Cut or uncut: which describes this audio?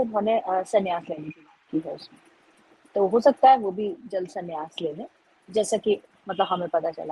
uncut